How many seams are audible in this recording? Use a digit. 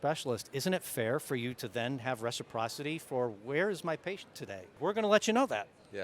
1